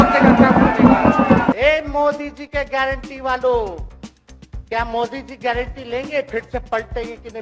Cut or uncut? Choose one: cut